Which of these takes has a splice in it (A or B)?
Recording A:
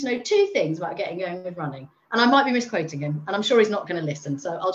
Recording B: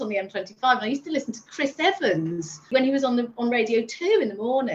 B